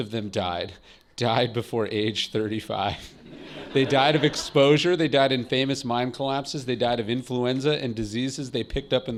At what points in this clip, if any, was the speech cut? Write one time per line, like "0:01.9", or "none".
none